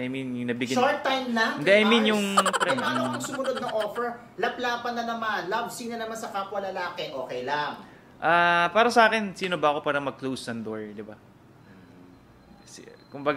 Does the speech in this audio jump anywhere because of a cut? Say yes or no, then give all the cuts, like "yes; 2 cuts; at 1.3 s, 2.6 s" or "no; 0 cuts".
yes; 1 cut; at 2.6 s